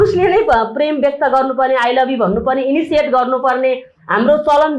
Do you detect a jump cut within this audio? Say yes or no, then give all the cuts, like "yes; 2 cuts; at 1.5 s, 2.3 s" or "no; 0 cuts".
no; 0 cuts